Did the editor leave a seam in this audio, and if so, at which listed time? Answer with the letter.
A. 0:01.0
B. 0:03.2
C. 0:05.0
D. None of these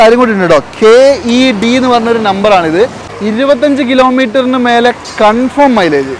B